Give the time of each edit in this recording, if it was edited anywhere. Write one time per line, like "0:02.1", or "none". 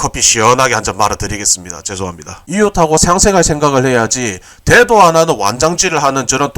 0:02.4